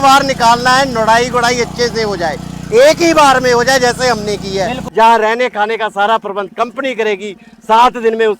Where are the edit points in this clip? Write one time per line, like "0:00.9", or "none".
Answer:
0:04.8